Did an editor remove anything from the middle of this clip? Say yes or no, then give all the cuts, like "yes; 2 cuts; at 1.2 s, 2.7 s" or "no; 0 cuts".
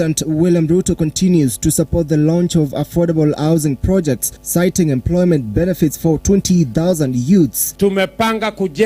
yes; 1 cut; at 4.3 s